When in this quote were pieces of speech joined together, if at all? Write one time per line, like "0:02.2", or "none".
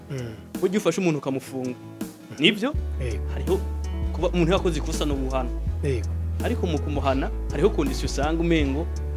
none